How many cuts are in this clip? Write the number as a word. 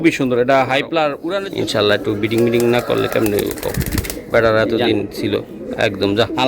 one